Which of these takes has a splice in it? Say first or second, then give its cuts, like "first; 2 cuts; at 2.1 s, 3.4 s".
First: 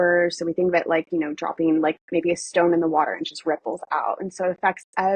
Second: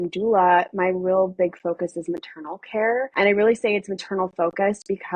second; 1 cut; at 3.1 s